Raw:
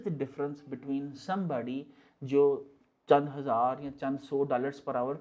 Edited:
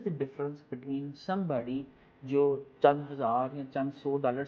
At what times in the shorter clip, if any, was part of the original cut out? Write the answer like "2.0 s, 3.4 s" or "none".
2.7 s